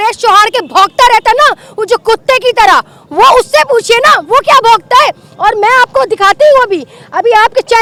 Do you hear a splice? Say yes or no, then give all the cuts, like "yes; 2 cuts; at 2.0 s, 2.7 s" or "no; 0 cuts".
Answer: no; 0 cuts